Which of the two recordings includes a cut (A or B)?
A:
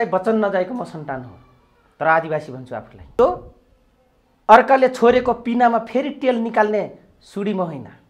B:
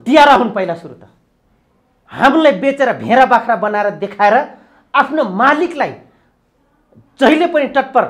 A